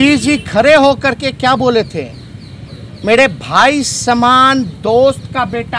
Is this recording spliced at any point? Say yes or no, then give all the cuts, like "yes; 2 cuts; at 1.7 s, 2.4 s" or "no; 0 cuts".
no; 0 cuts